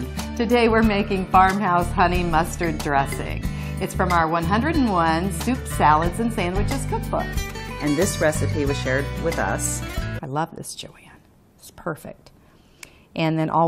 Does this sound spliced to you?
no; 0 cuts

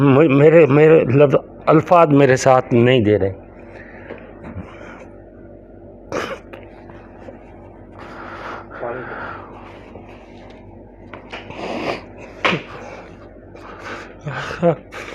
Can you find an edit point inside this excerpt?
no; 0 cuts

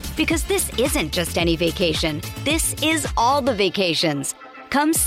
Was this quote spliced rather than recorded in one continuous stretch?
no; 0 cuts

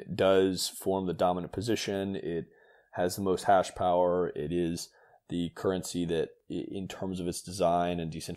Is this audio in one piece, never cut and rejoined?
no; 1 cut; at 6.4 s

